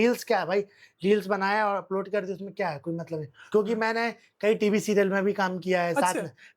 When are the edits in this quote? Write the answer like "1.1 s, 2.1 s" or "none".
3.3 s